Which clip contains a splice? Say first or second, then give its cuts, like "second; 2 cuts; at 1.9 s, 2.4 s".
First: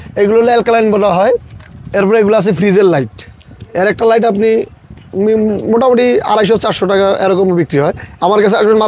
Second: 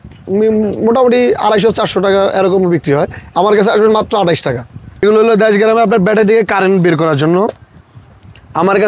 second; 1 cut; at 5.0 s